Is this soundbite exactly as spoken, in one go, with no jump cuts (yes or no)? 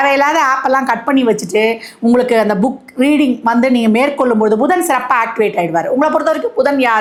yes